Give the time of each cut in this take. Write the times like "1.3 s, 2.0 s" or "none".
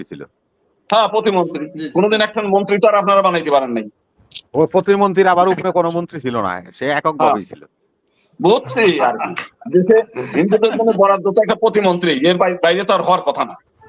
none